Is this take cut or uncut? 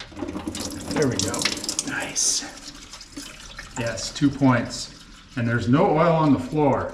uncut